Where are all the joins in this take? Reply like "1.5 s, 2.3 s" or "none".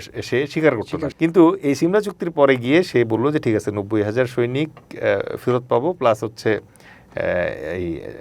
1.1 s